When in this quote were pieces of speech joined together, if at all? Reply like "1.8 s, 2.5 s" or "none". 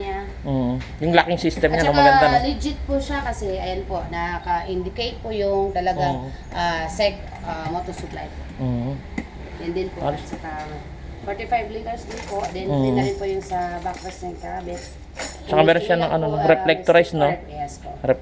none